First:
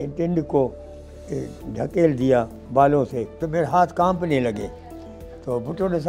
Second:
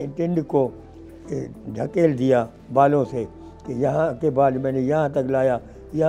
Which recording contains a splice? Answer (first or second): first